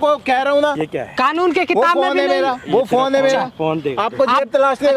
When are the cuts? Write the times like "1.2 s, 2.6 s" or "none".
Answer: none